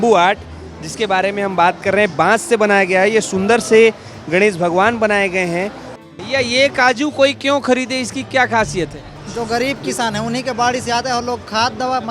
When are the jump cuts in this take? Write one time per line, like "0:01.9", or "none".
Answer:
0:05.9
0:09.1